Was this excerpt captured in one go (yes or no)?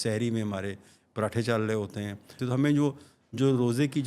no